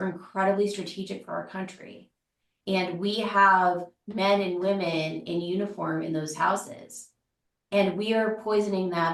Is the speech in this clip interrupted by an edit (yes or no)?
no